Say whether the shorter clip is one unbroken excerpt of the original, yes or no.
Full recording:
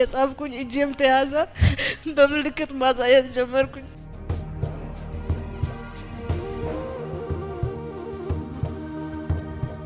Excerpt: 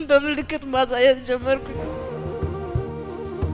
no